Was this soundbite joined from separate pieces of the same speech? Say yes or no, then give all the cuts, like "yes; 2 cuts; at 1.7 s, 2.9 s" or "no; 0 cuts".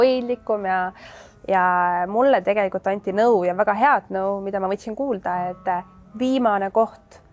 no; 0 cuts